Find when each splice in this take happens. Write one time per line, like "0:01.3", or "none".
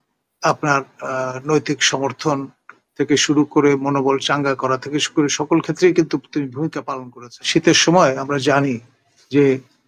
0:06.8